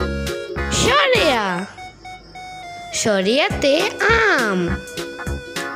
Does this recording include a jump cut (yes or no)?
yes